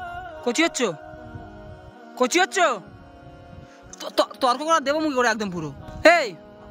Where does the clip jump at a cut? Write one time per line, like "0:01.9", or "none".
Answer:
0:05.8

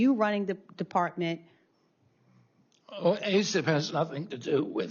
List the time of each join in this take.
none

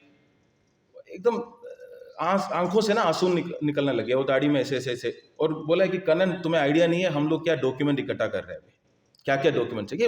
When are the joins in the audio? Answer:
none

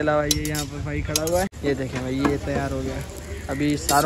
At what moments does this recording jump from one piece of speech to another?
0:01.5

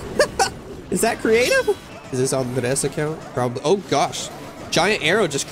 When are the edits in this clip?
0:01.9

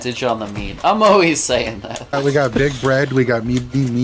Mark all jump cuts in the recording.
0:02.1

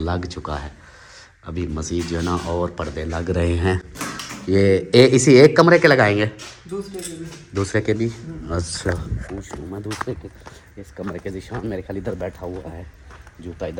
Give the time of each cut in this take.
none

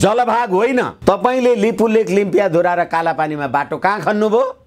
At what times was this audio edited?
0:00.9

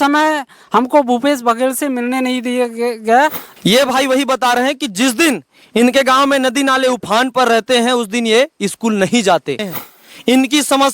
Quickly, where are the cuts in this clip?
0:03.4
0:09.7

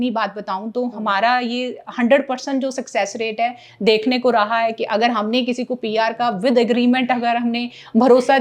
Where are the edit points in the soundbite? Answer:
none

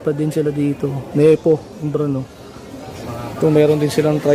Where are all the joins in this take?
0:02.9

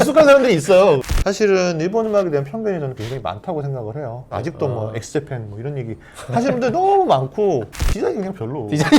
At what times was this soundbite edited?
0:01.0
0:04.3
0:07.7

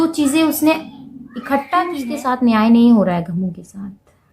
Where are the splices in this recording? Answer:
0:01.9

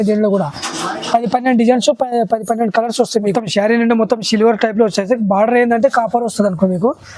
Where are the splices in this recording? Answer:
0:03.3

